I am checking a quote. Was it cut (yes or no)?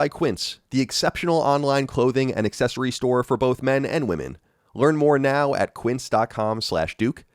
no